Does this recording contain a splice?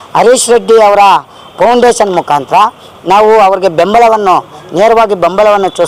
no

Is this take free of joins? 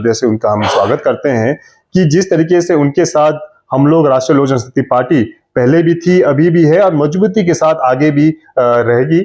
yes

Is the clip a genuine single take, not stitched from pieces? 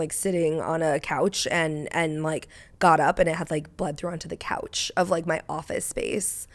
yes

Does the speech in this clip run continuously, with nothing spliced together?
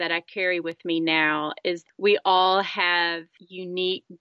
no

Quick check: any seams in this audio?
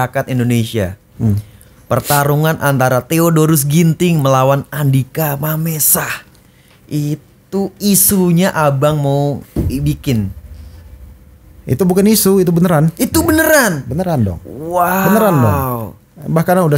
no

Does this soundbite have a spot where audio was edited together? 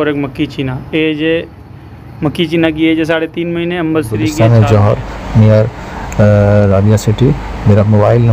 yes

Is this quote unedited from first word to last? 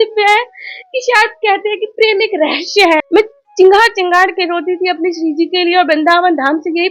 no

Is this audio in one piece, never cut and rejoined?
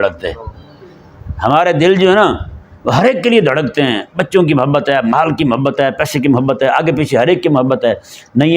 yes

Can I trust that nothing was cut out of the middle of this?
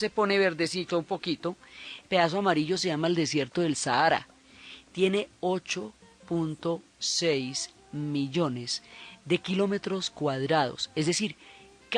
no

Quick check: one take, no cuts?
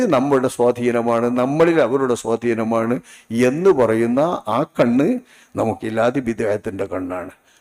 yes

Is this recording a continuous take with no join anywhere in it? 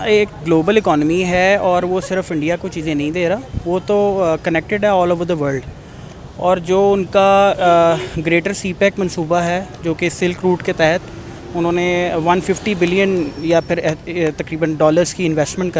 yes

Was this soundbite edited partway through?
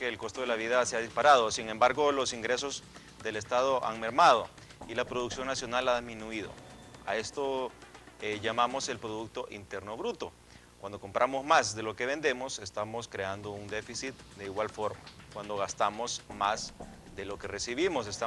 no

